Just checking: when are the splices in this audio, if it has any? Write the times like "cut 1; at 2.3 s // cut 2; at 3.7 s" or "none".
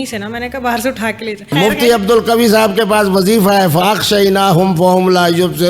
cut 1; at 1.5 s